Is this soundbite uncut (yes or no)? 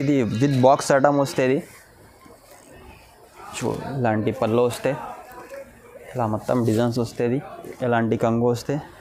no